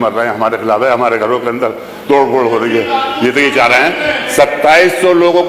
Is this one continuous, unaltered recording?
yes; 0 cuts

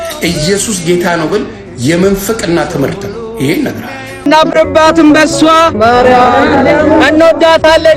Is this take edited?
yes; 1 cut; at 4.2 s

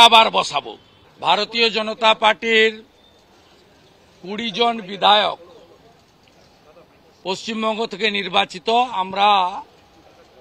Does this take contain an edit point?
yes; 1 cut; at 1.0 s

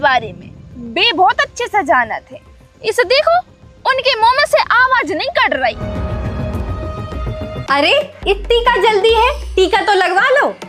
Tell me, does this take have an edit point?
yes; 1 cut; at 7.6 s

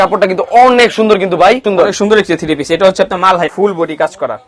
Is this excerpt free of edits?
no; 2 cuts; at 1.6 s, 3.5 s

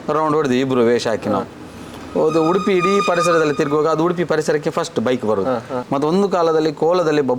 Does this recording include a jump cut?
yes; 1 cut; at 5.8 s

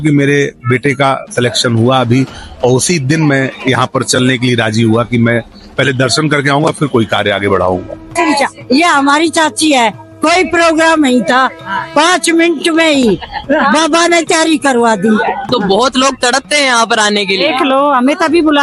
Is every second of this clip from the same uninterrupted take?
no; 2 cuts; at 8.1 s, 15.5 s

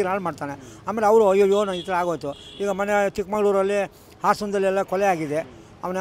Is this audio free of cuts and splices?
yes; 0 cuts

